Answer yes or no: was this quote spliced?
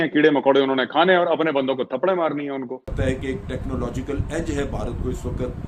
yes